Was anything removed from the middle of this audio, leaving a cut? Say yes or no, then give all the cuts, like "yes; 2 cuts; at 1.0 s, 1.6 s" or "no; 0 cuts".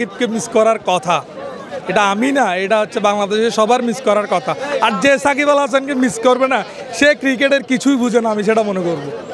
no; 0 cuts